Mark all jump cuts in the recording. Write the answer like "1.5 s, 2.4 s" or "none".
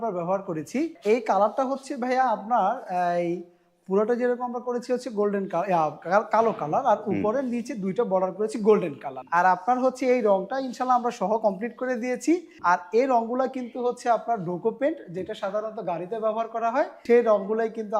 1.0 s, 9.1 s, 12.5 s, 17.0 s